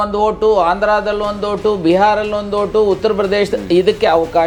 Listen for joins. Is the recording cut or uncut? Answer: uncut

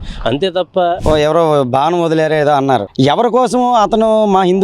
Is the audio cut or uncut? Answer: cut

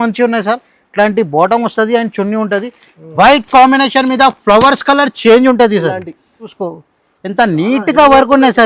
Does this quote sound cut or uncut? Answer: cut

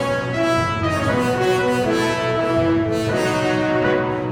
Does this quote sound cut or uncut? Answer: uncut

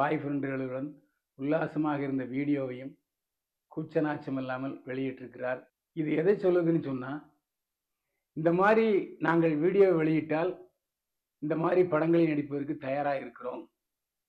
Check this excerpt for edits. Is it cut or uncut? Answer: cut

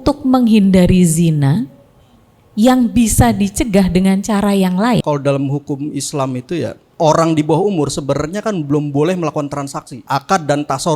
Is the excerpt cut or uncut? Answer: cut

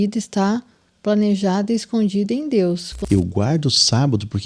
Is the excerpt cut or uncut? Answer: cut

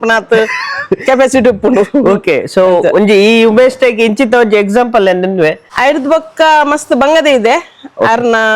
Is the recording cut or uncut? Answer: cut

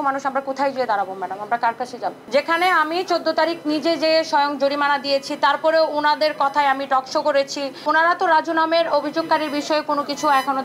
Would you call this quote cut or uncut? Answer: cut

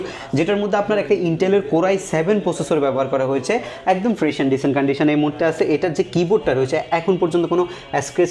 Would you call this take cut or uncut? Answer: uncut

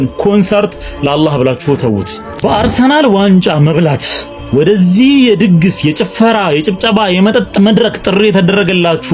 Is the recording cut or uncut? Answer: uncut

